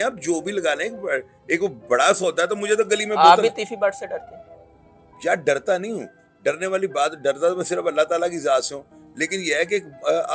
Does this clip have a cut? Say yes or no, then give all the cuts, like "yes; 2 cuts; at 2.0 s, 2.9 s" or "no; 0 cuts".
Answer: no; 0 cuts